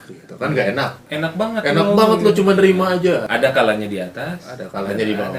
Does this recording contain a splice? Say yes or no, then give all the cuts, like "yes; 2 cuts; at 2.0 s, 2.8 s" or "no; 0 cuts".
yes; 1 cut; at 3.3 s